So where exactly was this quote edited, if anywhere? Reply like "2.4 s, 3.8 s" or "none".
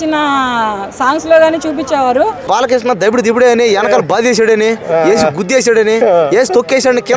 2.5 s